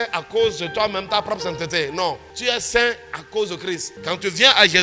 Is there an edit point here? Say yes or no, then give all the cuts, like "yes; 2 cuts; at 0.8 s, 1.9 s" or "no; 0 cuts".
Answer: yes; 2 cuts; at 2.3 s, 3.9 s